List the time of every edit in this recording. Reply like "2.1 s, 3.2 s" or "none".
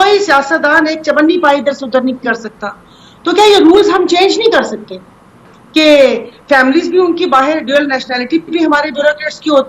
none